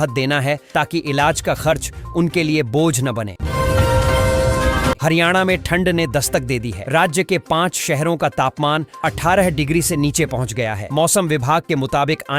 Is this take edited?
yes; 2 cuts; at 3.4 s, 5.0 s

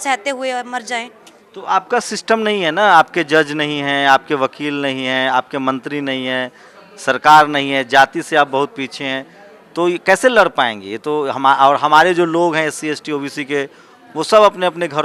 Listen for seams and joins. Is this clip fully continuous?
yes; 0 cuts

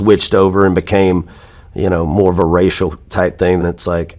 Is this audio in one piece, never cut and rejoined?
yes; 0 cuts

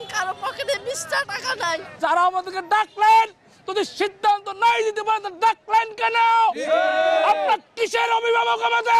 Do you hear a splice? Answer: yes; 1 cut; at 1.9 s

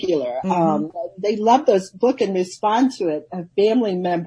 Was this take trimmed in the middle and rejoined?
yes; 1 cut; at 3.3 s

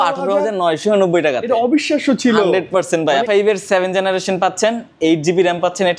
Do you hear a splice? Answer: yes; 1 cut; at 3.2 s

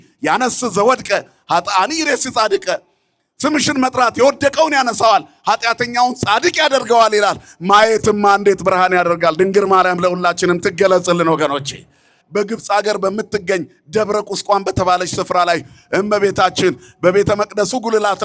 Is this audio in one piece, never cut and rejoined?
no; 1 cut; at 12.2 s

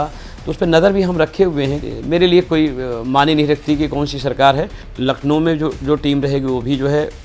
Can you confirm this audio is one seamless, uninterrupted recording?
no; 2 cuts; at 1.8 s, 4.8 s

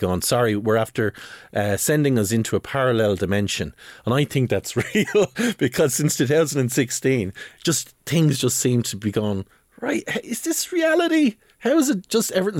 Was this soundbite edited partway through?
no; 0 cuts

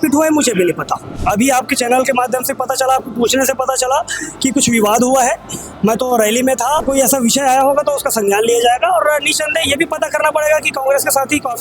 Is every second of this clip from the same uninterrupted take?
no; 2 cuts; at 1.2 s, 6.8 s

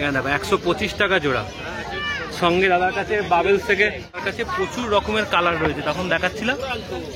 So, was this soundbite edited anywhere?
yes; 1 cut; at 4.2 s

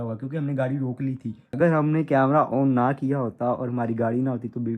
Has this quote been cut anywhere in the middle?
yes; 1 cut; at 1.4 s

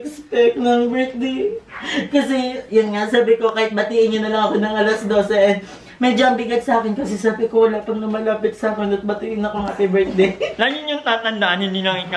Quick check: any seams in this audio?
yes; 1 cut; at 10.5 s

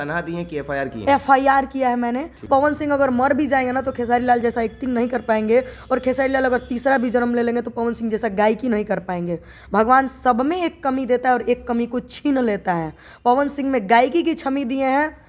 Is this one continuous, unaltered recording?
no; 1 cut; at 2.5 s

